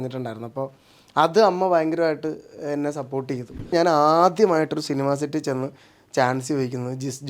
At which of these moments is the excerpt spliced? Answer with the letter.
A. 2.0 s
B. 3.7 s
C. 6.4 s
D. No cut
B